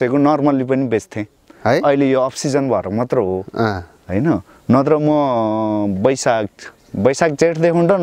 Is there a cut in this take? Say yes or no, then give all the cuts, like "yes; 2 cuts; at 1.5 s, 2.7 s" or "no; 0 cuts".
no; 0 cuts